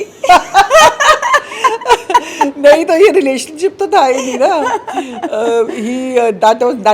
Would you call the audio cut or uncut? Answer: uncut